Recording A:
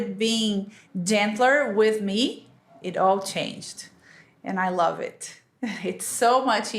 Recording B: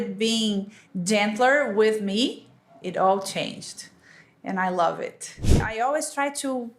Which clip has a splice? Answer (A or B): B